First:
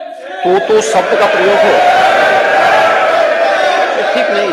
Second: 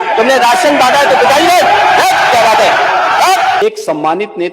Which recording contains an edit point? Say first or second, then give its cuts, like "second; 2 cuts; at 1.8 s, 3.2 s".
second; 1 cut; at 3.6 s